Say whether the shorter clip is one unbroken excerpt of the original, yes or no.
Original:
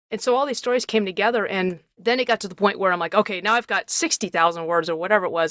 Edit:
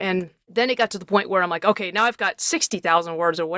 yes